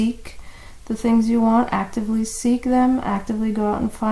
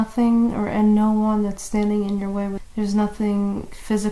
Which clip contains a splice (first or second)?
second